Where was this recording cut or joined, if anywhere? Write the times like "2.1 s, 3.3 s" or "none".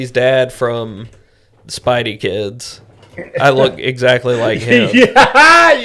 none